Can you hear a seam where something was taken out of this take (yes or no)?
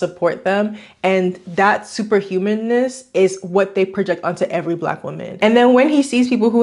yes